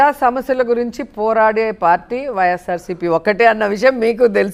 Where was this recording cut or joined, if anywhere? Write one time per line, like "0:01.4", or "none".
none